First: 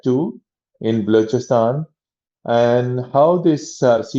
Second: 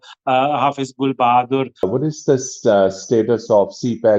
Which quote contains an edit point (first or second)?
second